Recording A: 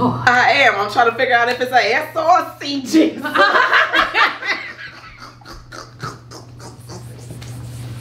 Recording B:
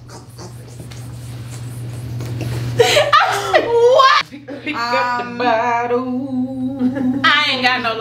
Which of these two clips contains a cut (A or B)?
B